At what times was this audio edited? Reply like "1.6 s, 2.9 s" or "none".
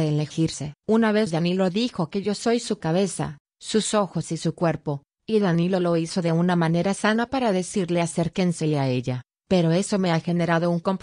none